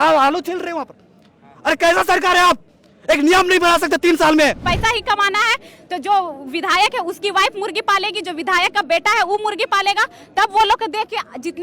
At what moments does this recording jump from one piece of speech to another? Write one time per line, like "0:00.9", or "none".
0:04.7